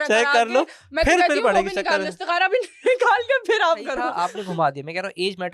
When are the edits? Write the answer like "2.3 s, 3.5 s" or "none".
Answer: 4.0 s